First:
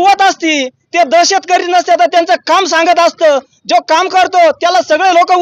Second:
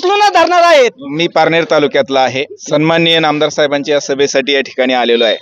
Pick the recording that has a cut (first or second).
second